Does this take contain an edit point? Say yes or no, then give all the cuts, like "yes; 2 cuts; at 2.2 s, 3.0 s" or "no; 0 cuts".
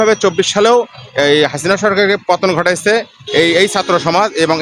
no; 0 cuts